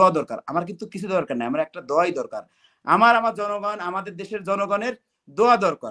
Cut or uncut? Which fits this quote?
uncut